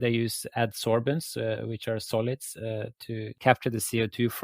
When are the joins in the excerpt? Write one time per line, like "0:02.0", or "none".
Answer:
0:03.3